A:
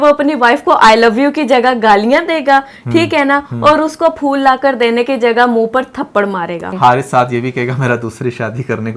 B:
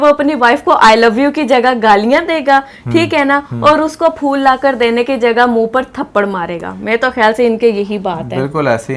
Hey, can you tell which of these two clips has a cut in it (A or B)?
A